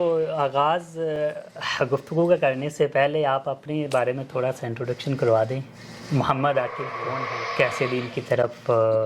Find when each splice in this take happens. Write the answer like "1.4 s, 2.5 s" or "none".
7.1 s